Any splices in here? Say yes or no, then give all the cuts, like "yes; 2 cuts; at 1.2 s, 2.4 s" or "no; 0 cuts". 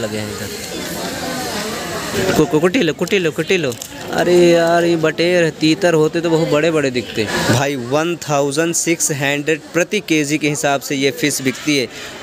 yes; 2 cuts; at 2.1 s, 7.3 s